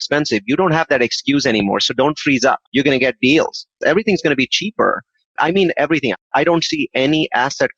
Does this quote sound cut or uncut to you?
cut